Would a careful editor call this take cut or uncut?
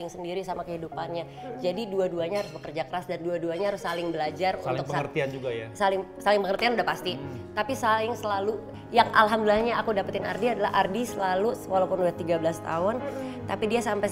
uncut